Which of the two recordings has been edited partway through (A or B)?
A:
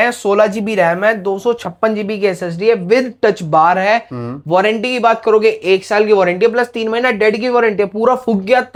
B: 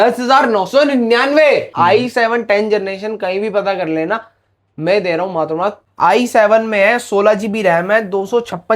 B